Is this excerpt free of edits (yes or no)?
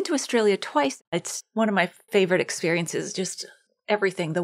no